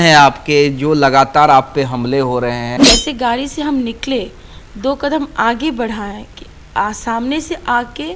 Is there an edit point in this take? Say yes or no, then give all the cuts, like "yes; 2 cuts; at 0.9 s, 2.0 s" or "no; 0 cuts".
yes; 1 cut; at 2.8 s